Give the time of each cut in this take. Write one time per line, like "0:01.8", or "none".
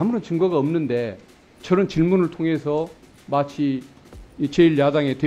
none